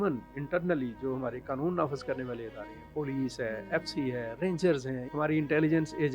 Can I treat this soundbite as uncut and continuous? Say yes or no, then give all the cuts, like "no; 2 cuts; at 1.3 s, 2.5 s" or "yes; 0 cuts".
no; 1 cut; at 5.0 s